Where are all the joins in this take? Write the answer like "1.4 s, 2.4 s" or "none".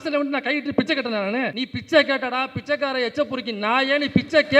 1.6 s